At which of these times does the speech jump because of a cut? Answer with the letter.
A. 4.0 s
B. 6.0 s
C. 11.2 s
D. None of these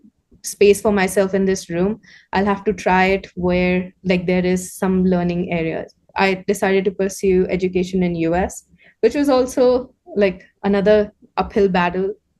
D